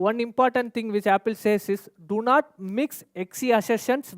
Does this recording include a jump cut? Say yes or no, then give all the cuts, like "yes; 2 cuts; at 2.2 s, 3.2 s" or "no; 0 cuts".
no; 0 cuts